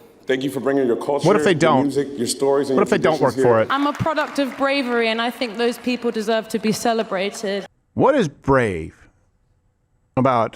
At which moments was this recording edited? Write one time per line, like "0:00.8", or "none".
0:03.7
0:07.8

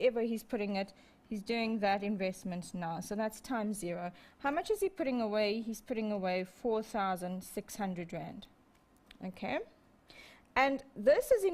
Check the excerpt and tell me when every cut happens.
0:05.5

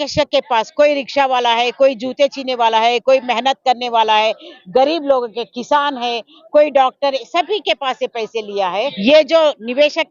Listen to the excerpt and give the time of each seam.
0:08.9

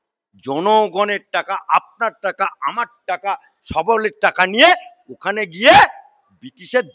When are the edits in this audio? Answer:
none

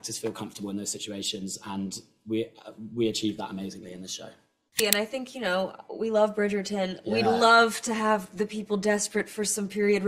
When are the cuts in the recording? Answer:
0:04.8

